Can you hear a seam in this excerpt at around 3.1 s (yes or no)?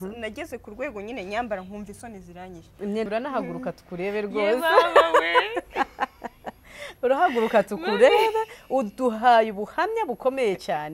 yes